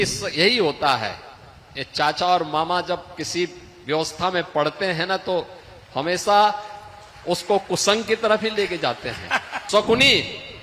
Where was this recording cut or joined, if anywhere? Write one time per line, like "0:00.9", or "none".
0:09.5